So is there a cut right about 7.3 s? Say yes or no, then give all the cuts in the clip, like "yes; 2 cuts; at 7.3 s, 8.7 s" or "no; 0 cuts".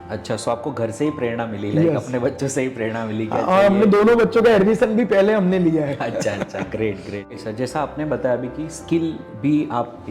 yes; 1 cut; at 7.3 s